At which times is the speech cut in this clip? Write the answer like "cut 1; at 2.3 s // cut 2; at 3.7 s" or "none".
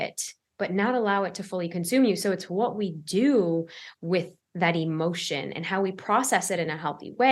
none